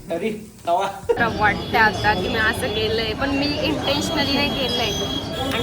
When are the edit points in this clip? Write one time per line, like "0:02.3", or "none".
0:01.2